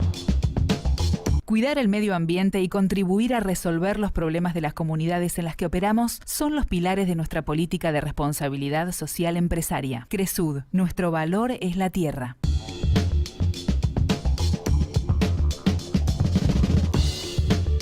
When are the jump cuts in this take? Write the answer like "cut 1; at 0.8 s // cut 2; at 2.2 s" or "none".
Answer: cut 1; at 1.4 s